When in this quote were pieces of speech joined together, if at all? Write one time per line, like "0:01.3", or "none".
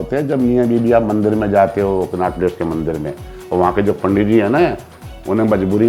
none